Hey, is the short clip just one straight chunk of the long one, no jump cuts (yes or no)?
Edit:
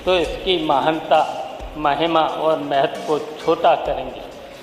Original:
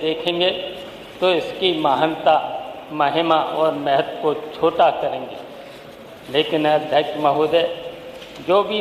yes